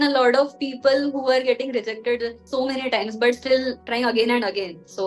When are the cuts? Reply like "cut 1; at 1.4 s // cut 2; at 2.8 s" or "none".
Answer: cut 1; at 2.4 s // cut 2; at 3.8 s